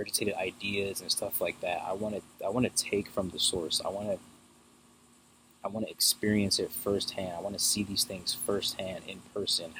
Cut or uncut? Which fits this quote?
uncut